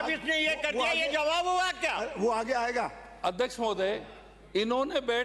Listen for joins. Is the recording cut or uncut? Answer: uncut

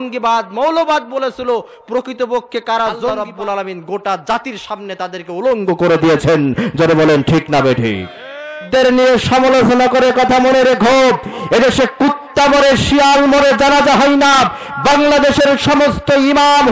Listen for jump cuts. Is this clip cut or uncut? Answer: cut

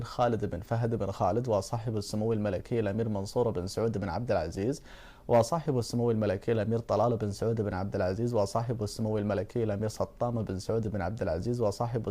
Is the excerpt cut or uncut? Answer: cut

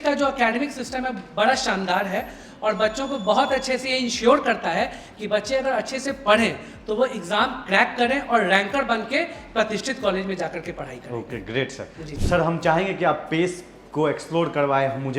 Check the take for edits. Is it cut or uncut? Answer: uncut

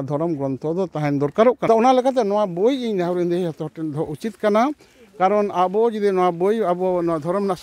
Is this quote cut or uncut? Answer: cut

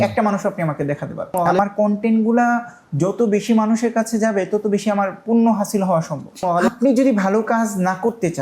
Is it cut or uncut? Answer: cut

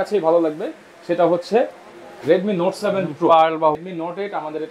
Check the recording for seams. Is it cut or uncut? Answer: cut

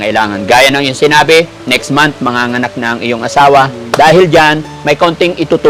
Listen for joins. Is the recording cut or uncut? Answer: uncut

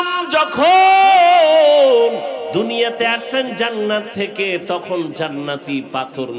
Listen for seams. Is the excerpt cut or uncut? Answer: cut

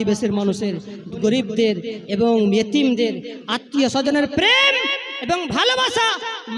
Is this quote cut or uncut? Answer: cut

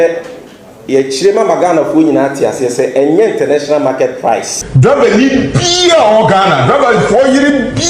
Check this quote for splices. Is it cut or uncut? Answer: cut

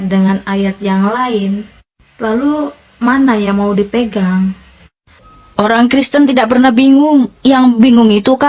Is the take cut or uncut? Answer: cut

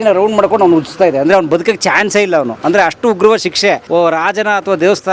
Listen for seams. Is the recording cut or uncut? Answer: cut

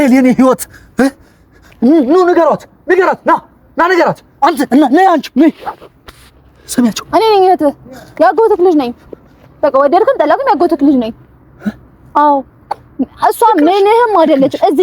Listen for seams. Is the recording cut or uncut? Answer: uncut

